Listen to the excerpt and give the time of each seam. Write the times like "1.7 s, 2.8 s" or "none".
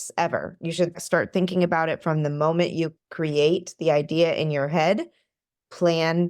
1.0 s, 3.0 s